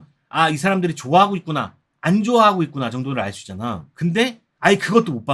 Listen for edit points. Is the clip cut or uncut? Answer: uncut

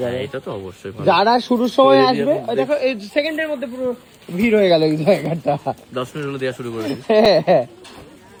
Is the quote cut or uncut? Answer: uncut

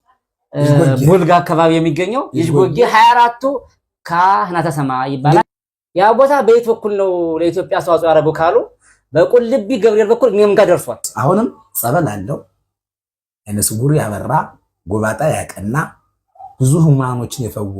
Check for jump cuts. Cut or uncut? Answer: cut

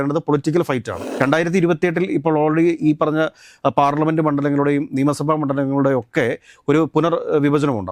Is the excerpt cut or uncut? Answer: cut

